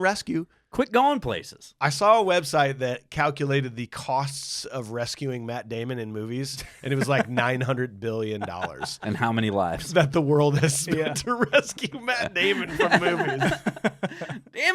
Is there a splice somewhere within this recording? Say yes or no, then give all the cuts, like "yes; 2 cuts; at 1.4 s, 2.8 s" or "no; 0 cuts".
no; 0 cuts